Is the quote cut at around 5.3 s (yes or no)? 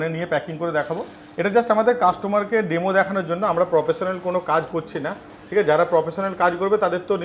no